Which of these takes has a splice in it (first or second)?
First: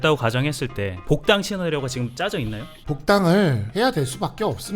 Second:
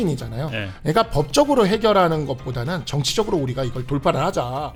first